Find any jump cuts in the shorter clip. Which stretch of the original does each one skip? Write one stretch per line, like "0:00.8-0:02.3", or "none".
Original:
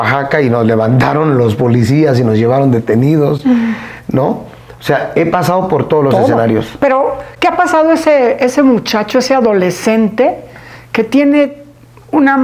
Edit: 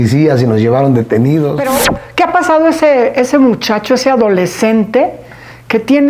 0:03.4-0:06.8